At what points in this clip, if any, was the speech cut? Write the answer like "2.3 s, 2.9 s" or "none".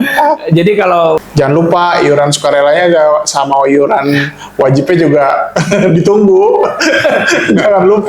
1.2 s